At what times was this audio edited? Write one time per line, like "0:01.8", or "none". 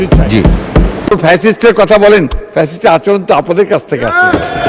0:01.1